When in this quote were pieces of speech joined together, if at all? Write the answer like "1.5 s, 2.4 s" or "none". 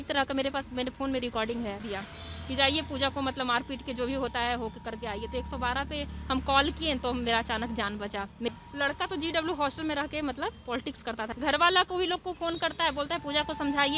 1.8 s, 8.5 s, 11.3 s